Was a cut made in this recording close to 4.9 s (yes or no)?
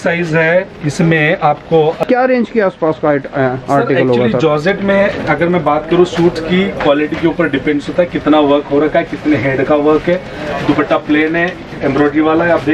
no